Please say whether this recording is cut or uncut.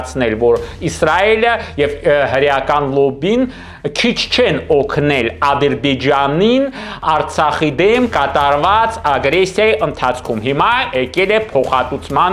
uncut